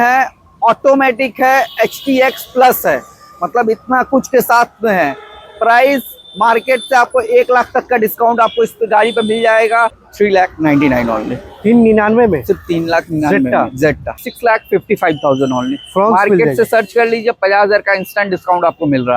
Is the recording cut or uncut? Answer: cut